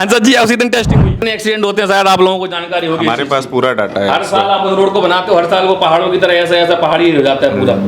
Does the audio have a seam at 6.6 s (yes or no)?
no